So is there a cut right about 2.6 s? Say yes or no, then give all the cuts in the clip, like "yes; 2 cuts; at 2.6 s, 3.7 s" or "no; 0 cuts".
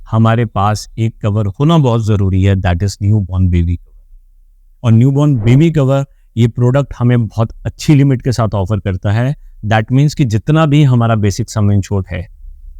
no; 0 cuts